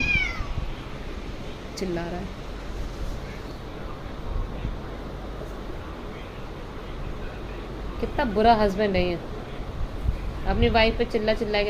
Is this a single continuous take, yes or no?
yes